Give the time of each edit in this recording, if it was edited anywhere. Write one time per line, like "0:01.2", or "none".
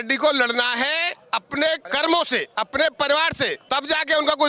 0:01.8
0:02.5
0:03.6